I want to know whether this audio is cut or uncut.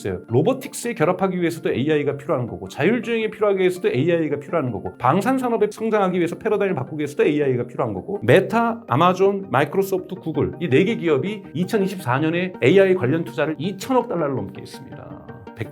cut